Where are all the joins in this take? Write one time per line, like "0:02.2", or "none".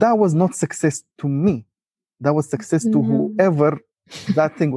none